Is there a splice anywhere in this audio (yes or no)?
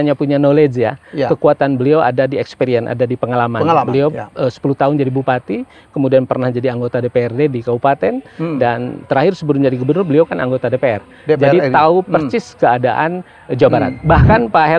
no